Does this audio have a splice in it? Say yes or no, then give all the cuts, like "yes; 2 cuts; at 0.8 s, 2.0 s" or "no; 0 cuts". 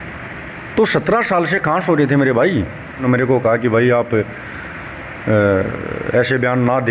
yes; 1 cut; at 3.0 s